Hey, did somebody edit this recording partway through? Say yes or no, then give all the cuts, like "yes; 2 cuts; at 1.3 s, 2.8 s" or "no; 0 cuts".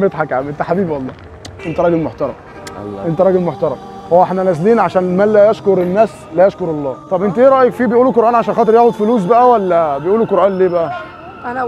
yes; 1 cut; at 6.9 s